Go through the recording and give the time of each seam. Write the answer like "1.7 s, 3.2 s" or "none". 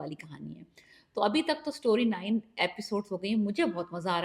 none